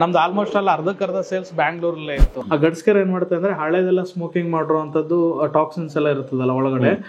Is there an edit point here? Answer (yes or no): yes